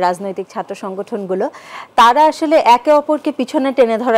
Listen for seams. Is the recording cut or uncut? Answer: uncut